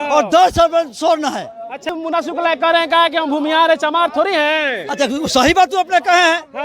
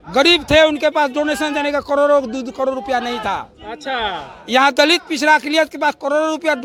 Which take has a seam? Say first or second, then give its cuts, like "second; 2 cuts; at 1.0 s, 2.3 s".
first; 1 cut; at 1.9 s